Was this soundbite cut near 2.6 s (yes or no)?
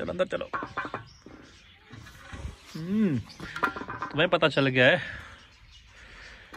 no